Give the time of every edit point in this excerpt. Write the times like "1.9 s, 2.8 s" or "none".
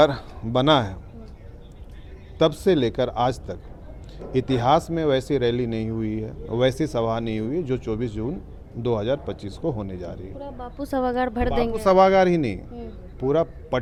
none